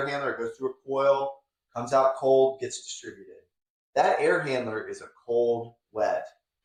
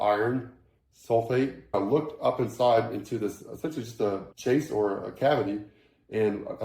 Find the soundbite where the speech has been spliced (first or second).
second